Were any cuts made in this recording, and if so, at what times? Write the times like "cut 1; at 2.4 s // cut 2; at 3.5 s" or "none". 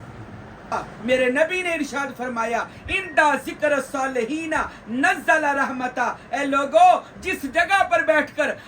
cut 1; at 0.9 s